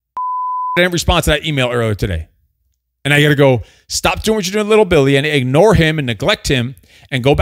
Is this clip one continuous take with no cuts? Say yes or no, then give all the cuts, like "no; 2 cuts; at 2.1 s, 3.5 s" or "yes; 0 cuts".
yes; 0 cuts